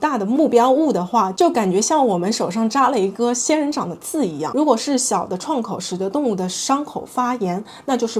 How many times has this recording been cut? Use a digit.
0